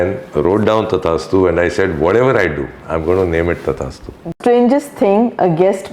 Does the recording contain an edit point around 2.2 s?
no; 1 cut; at 4.3 s

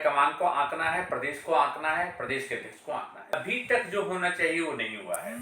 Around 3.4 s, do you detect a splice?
yes; 1 cut; at 3.4 s

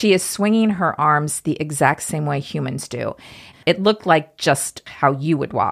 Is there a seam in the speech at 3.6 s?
yes; 2 cuts; at 3.6 s, 4.8 s

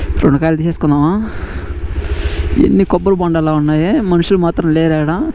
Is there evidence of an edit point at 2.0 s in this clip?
no; 0 cuts

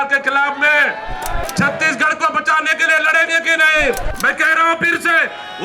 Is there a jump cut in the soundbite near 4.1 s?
yes; 2 cuts; at 1.4 s, 4.1 s

